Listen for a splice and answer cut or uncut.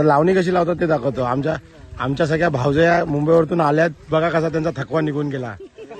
uncut